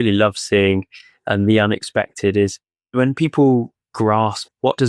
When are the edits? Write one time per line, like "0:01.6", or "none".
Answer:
none